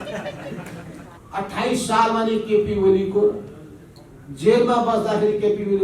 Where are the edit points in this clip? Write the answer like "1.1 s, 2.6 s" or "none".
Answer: 1.1 s